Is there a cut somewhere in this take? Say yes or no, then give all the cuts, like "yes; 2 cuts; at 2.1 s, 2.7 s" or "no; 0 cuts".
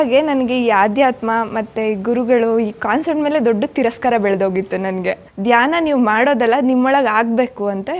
yes; 1 cut; at 5.3 s